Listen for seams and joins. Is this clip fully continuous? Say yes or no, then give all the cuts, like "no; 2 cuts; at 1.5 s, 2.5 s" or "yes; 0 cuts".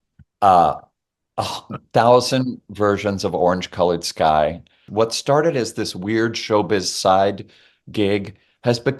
no; 1 cut; at 4.8 s